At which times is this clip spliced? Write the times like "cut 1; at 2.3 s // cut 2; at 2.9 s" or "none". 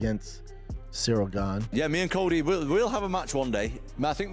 cut 1; at 1.7 s